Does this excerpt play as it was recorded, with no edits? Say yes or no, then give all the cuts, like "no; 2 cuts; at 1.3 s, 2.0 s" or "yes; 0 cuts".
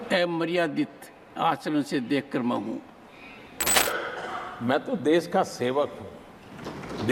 no; 1 cut; at 3.8 s